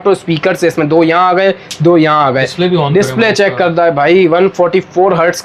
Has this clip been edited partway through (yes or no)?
no